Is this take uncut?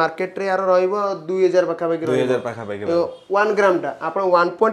yes; 0 cuts

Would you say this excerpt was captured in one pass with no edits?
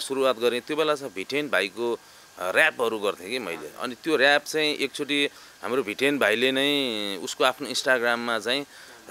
yes; 0 cuts

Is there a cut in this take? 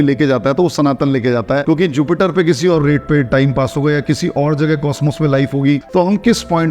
yes; 2 cuts; at 1.6 s, 5.8 s

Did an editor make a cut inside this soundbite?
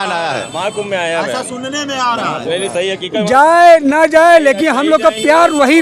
no; 0 cuts

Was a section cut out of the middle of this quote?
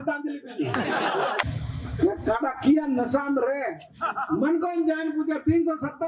yes; 1 cut; at 1.4 s

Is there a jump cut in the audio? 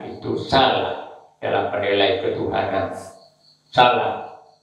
no; 0 cuts

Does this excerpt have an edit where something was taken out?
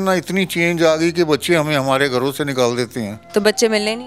yes; 1 cut; at 3.2 s

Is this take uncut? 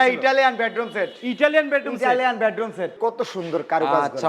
no; 1 cut; at 3.0 s

